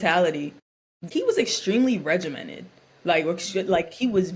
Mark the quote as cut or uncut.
cut